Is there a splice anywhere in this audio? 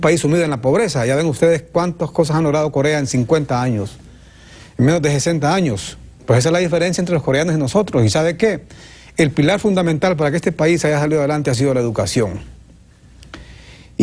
no; 0 cuts

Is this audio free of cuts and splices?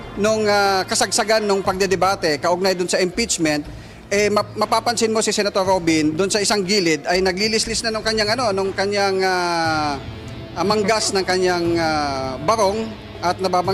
yes; 0 cuts

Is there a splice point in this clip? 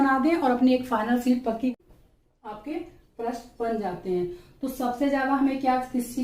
yes; 1 cut; at 1.7 s

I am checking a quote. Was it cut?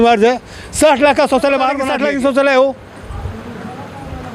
yes; 1 cut; at 1.9 s

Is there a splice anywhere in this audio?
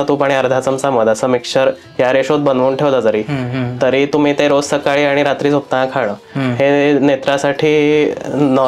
no; 0 cuts

